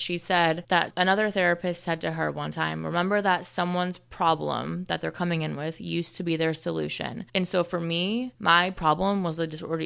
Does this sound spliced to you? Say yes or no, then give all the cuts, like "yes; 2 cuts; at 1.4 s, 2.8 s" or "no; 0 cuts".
yes; 2 cuts; at 7.2 s, 8.3 s